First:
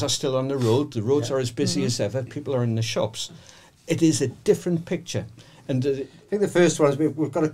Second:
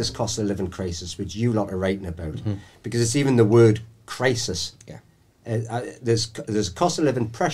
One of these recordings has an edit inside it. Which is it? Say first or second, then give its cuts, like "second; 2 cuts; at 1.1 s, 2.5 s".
first; 1 cut; at 6.1 s